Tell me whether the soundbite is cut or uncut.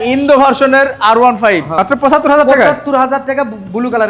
cut